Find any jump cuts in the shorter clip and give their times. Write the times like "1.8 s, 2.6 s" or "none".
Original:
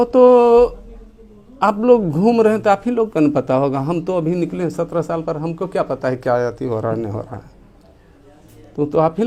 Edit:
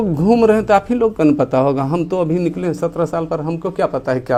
none